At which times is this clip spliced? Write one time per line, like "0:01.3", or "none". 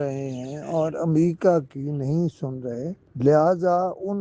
0:03.0